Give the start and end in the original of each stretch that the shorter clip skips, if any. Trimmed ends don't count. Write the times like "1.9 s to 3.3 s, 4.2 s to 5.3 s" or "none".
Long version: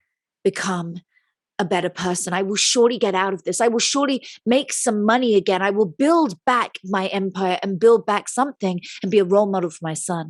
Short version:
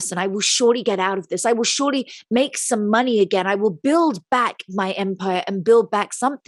none